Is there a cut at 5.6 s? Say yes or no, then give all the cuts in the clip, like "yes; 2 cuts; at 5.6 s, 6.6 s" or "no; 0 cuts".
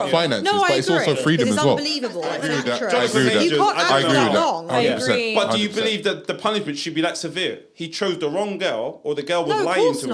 no; 1 cut; at 2.5 s